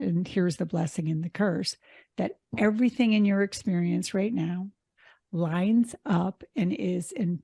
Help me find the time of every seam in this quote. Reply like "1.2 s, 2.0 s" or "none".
4.9 s